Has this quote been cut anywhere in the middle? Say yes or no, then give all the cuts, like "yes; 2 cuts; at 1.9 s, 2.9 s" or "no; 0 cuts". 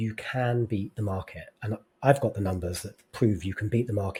no; 0 cuts